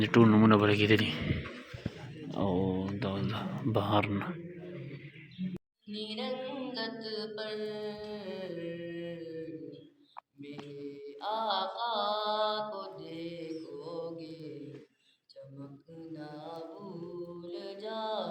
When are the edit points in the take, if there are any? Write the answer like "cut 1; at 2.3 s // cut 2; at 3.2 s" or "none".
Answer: cut 1; at 5.7 s